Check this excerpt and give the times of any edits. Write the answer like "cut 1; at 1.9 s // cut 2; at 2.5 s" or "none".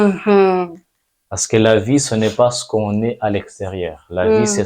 none